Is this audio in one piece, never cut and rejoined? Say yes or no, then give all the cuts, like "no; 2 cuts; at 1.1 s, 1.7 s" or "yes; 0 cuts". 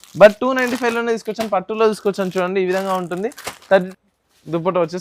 no; 1 cut; at 3.9 s